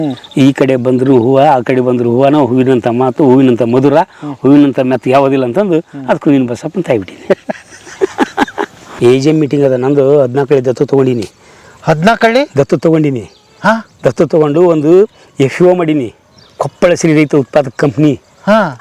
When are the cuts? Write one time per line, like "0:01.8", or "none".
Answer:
0:08.9